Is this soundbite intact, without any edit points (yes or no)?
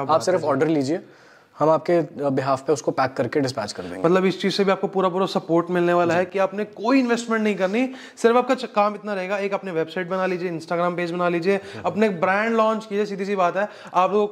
yes